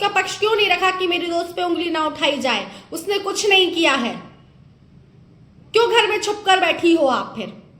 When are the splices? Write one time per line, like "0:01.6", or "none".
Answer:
none